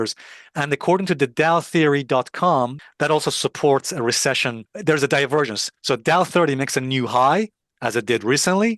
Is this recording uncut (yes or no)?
no